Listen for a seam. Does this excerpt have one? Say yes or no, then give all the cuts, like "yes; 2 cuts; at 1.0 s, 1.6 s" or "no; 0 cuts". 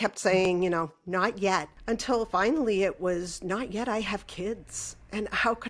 yes; 1 cut; at 1.7 s